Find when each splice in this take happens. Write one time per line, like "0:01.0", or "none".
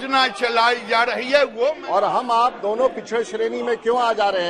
0:01.8